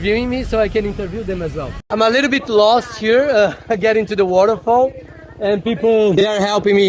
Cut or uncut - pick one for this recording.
cut